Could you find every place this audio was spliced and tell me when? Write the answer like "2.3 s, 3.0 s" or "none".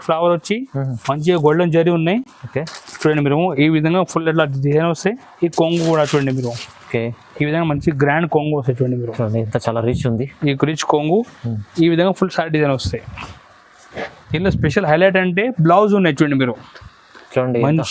none